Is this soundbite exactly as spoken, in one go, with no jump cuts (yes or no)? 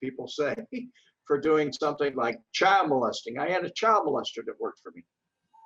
yes